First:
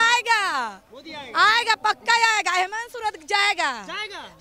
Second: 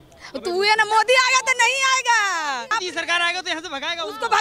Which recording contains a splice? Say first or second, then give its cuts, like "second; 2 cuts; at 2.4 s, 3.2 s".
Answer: second; 1 cut; at 2.7 s